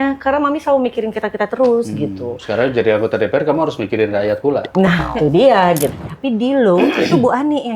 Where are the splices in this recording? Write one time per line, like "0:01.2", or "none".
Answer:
0:05.9